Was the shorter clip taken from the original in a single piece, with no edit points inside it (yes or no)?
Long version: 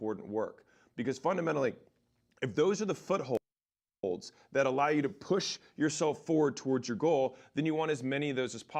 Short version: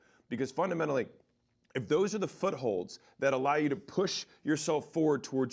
no